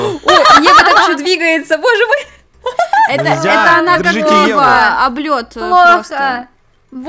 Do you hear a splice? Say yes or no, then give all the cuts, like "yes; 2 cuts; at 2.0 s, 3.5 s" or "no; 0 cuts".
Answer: no; 0 cuts